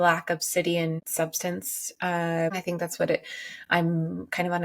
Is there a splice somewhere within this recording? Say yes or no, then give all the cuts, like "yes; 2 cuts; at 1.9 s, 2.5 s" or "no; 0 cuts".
yes; 2 cuts; at 1.0 s, 2.5 s